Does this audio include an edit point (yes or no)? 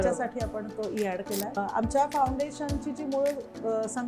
yes